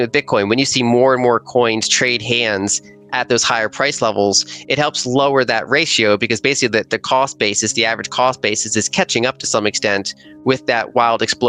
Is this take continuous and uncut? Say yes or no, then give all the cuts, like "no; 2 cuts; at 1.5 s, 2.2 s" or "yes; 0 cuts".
yes; 0 cuts